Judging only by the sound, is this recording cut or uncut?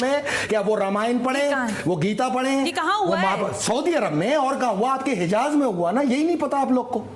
uncut